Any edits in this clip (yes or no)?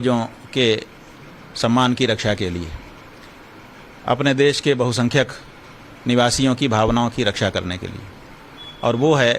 yes